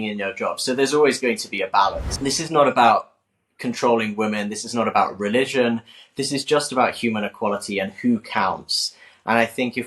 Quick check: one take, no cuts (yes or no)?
no